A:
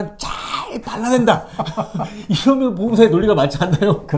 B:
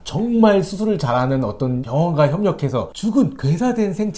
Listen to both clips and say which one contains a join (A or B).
B